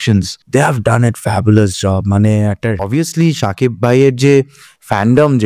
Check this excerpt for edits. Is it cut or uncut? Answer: cut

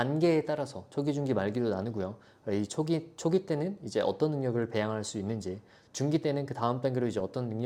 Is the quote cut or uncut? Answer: uncut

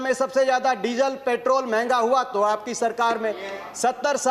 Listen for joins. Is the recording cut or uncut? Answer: uncut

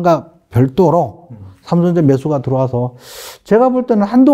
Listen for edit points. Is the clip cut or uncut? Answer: uncut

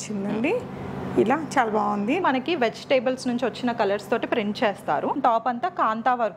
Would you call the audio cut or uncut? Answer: cut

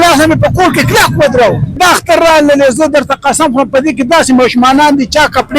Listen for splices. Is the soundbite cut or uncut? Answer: cut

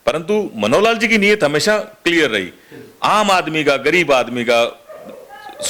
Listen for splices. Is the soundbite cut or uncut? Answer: uncut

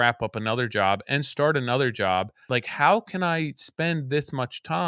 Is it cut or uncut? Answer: cut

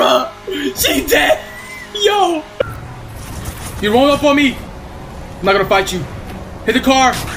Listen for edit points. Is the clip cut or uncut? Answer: cut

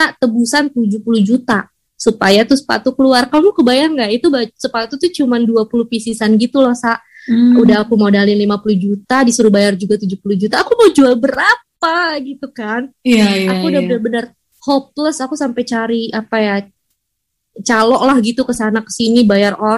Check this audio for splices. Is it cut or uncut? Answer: uncut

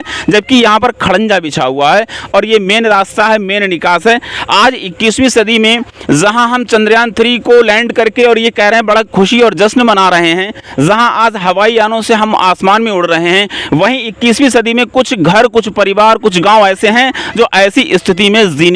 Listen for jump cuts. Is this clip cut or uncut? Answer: uncut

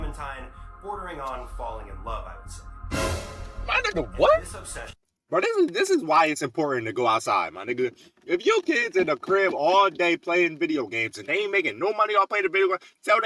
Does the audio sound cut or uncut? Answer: uncut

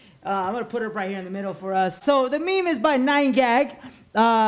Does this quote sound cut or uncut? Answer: cut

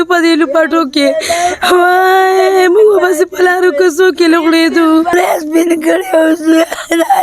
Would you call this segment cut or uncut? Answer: cut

